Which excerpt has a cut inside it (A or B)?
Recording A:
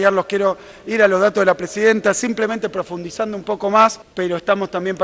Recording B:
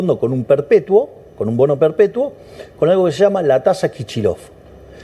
A